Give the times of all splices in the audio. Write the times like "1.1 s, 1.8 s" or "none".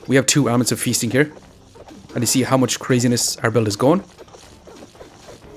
4.1 s